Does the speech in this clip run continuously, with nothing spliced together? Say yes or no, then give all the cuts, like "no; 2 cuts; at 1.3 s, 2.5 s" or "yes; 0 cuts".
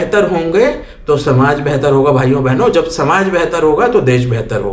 yes; 0 cuts